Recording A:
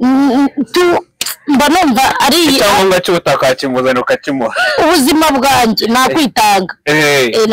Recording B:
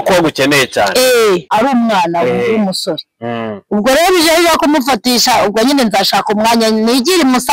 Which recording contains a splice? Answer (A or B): B